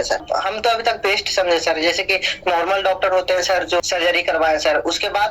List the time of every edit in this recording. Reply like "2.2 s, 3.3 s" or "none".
3.8 s